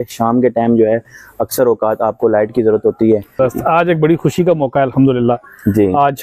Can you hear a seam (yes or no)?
yes